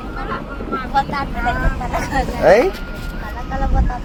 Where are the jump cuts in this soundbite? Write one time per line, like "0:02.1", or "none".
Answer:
none